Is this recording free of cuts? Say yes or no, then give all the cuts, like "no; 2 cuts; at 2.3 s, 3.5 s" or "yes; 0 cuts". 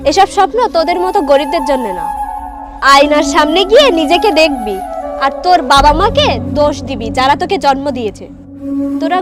yes; 0 cuts